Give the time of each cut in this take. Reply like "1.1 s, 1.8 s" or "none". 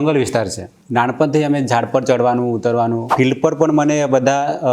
3.1 s